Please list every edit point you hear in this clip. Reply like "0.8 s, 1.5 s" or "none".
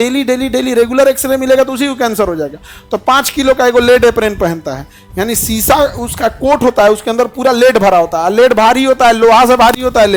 none